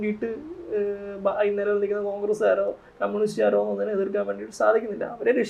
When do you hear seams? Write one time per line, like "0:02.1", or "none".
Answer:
none